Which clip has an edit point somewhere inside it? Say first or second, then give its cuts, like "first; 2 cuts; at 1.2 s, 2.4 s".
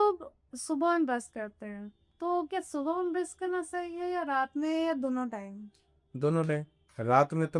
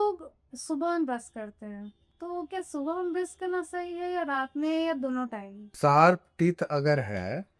second; 1 cut; at 5.7 s